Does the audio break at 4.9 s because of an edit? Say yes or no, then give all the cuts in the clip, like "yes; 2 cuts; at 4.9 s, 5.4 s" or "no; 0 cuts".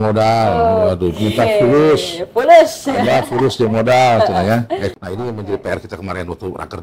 yes; 1 cut; at 4.9 s